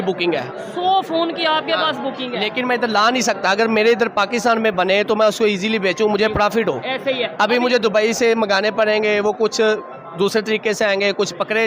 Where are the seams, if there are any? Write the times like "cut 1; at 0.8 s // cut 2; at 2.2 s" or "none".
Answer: none